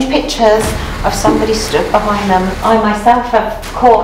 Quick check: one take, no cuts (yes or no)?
no